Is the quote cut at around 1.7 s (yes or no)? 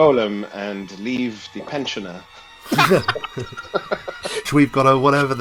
no